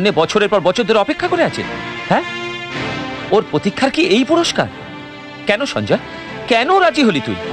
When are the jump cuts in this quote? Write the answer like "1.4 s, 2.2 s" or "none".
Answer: none

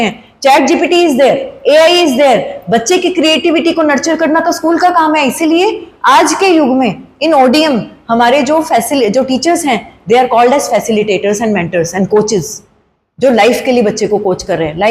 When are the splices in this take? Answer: none

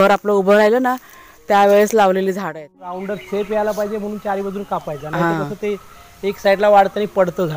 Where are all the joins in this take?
3.0 s

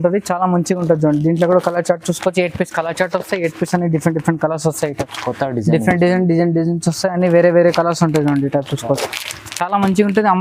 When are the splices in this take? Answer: none

